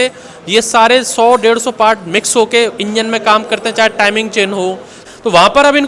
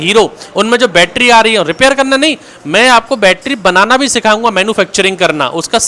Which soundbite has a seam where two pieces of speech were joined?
first; 1 cut; at 5.0 s

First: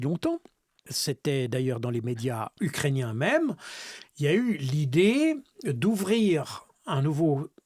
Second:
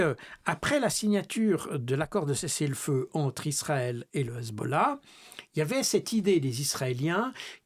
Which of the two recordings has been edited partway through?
first; 2 cuts; at 0.9 s, 2.5 s

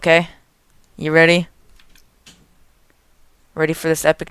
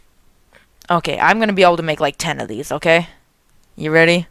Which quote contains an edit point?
second; 1 cut; at 1.4 s

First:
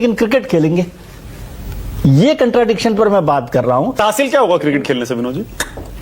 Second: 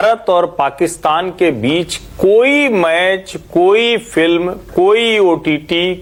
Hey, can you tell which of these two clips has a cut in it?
first; 1 cut; at 4.0 s

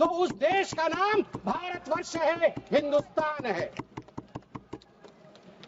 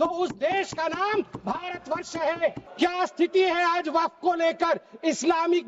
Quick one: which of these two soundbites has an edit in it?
second; 1 cut; at 2.6 s

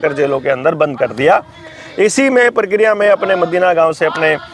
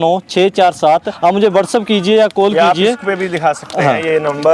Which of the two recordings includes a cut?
second; 1 cut; at 1.1 s

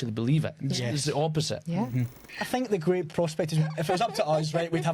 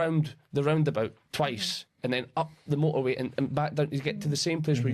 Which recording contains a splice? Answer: first; 1 cut; at 2.3 s

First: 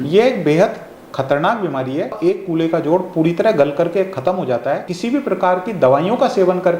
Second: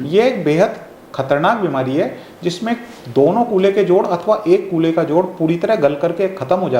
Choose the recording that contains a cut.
first; 2 cuts; at 2.2 s, 4.9 s

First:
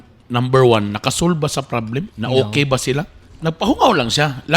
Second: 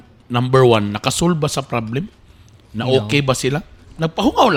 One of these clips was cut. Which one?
first; 1 cut; at 2.1 s

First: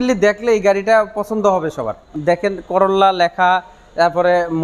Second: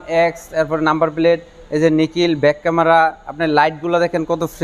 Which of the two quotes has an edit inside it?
first; 1 cut; at 2.1 s

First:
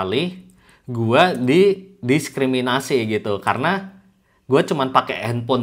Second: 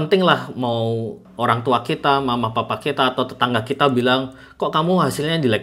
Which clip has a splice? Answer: second; 1 cut; at 1.2 s

